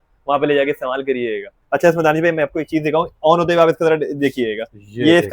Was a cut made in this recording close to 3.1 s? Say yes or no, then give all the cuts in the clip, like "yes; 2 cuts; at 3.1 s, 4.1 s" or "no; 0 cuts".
no; 1 cut; at 1.5 s